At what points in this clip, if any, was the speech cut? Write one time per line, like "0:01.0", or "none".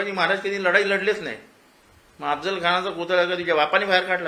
none